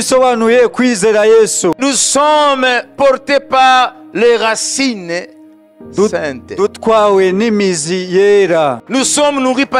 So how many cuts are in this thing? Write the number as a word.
two